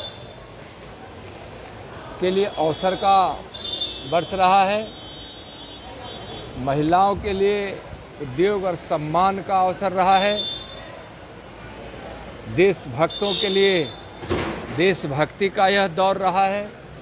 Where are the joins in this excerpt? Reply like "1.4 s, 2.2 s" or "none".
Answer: none

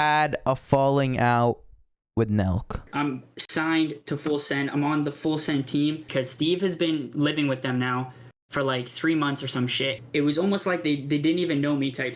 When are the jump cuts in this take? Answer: 2.9 s, 6.0 s, 10.0 s

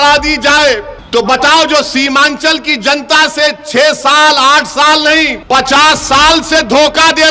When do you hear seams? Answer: 0.9 s, 5.4 s

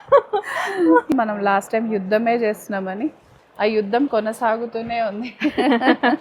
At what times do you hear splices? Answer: 1.1 s

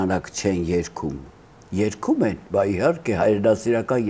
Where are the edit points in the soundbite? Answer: 2.4 s

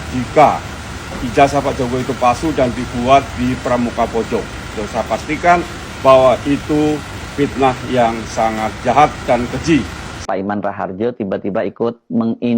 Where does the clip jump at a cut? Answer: 4.7 s, 10.2 s

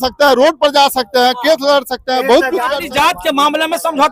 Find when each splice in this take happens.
2.8 s

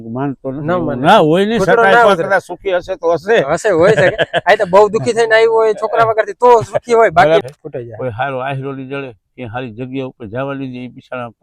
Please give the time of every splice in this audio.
7.4 s

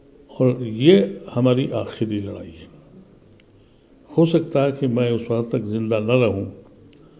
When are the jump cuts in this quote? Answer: none

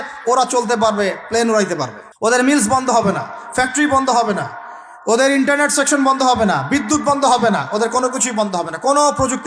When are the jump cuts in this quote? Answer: 2.0 s

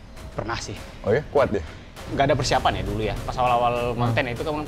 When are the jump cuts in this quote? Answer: 2.0 s

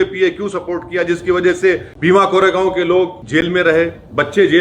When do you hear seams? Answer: 1.9 s, 3.2 s

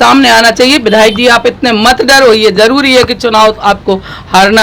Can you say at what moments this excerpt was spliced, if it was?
none

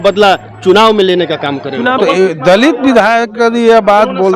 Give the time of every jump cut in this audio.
2.0 s

